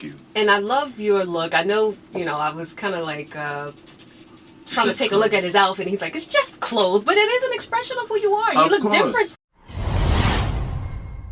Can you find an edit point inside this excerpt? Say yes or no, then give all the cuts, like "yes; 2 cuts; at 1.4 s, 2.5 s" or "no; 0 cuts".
no; 0 cuts